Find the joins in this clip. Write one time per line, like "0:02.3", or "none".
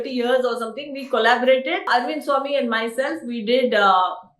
0:01.8